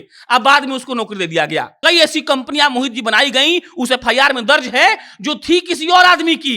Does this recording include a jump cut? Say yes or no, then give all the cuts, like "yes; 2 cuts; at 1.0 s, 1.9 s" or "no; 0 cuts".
yes; 1 cut; at 1.7 s